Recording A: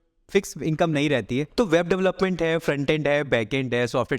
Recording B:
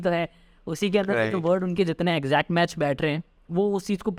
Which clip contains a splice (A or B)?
A